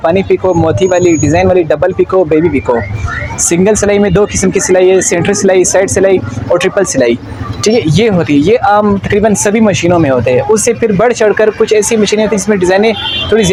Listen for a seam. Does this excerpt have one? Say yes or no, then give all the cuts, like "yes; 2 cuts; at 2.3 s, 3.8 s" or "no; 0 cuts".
no; 0 cuts